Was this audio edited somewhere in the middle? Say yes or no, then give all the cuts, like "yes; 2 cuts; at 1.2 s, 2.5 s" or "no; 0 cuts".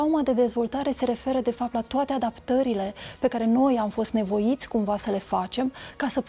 no; 0 cuts